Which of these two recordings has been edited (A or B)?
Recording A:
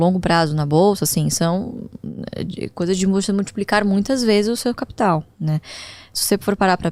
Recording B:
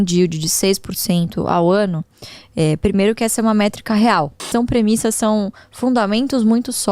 B